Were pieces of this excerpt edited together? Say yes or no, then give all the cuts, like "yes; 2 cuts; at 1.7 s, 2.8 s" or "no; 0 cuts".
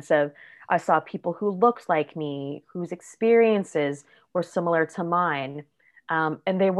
no; 0 cuts